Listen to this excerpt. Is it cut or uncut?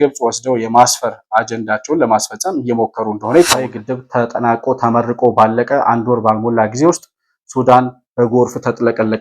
cut